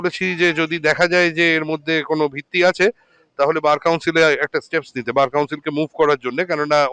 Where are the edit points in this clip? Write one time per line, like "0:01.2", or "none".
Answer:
none